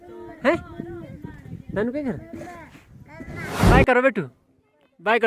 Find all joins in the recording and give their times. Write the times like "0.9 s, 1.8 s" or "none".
3.7 s